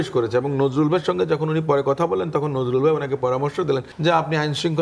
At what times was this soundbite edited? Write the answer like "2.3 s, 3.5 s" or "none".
3.9 s